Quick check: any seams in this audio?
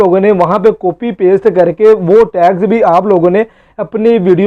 no; 0 cuts

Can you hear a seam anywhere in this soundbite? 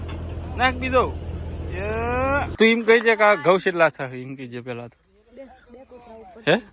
yes; 1 cut; at 2.5 s

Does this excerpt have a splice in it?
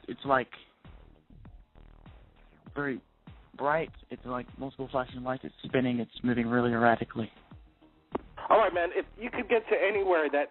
no; 0 cuts

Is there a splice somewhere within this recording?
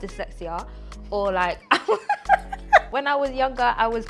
yes; 1 cut; at 2.9 s

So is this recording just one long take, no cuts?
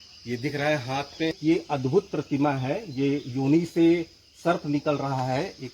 no; 1 cut; at 1.4 s

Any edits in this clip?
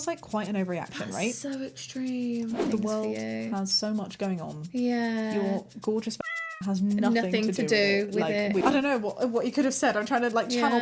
yes; 2 cuts; at 2.6 s, 8.4 s

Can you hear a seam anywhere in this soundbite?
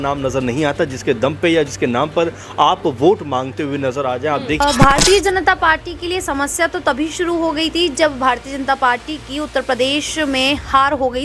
yes; 1 cut; at 4.6 s

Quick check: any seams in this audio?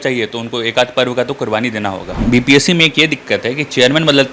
yes; 1 cut; at 2.2 s

